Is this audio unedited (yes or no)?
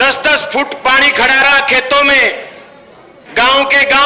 yes